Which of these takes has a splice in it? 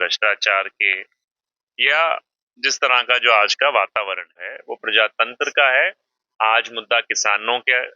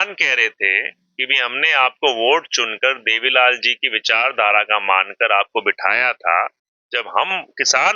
first; 1 cut; at 4.7 s

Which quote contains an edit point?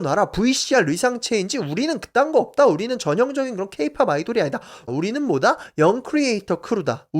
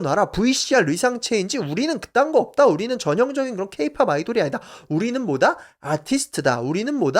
first; 1 cut; at 4.9 s

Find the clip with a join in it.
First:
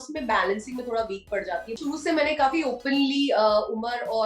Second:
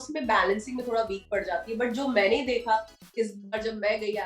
first; 1 cut; at 1.7 s

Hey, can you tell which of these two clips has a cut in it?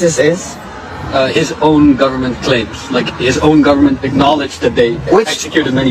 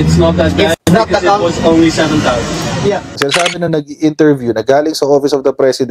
second; 2 cuts; at 0.8 s, 3.1 s

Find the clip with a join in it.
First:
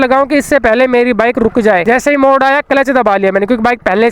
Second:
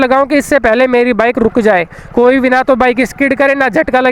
first; 1 cut; at 1.8 s

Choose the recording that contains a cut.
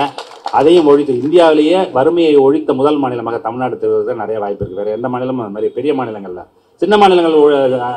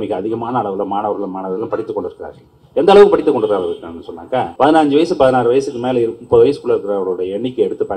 second; 1 cut; at 4.5 s

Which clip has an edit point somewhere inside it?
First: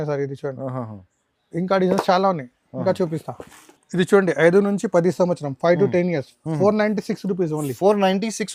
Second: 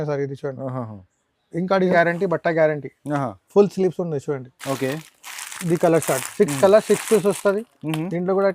second; 1 cut; at 1.9 s

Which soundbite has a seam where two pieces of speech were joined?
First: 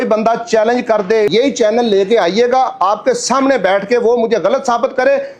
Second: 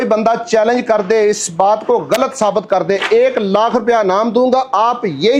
first; 1 cut; at 1.3 s

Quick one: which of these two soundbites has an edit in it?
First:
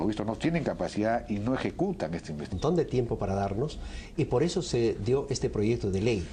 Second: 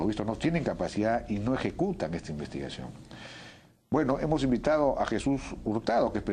second; 1 cut; at 2.6 s

